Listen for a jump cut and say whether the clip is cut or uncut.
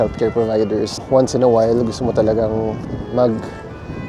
cut